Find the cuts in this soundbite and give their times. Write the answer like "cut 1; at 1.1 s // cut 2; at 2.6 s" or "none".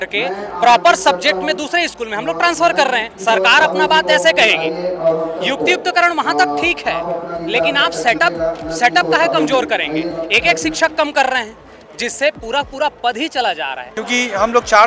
cut 1; at 13.9 s